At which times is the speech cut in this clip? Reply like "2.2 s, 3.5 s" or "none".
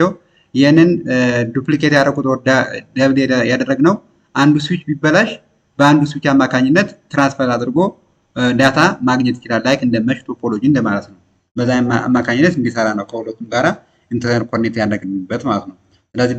none